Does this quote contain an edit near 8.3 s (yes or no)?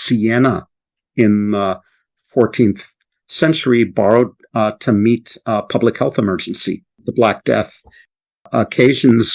yes